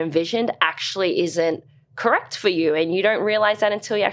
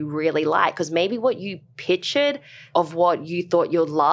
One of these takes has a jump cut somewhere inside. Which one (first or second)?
second